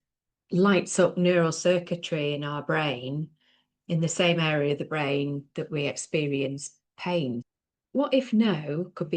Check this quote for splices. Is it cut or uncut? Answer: cut